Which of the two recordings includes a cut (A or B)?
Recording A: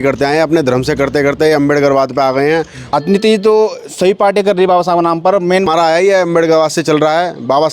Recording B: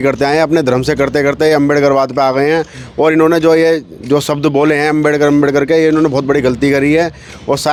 A